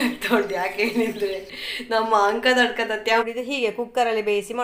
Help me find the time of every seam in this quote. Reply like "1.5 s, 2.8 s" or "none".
3.2 s